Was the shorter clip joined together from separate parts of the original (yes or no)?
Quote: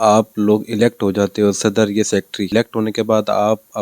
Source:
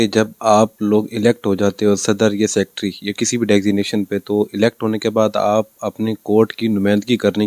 yes